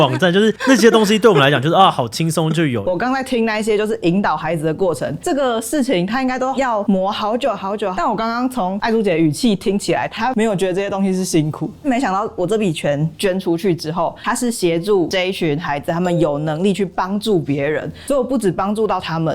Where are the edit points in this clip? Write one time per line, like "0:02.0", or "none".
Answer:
0:02.8
0:07.9
0:10.1
0:11.8